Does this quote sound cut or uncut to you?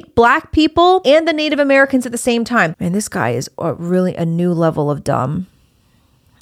cut